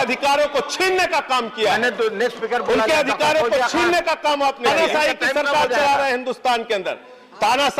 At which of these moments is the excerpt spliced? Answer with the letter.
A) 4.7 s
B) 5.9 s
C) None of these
A